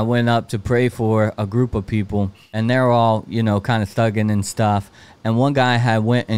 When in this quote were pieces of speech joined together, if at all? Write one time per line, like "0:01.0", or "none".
0:02.4